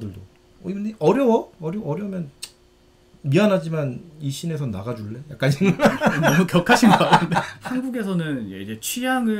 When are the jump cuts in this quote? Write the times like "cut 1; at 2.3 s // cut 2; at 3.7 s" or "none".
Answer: cut 1; at 7.6 s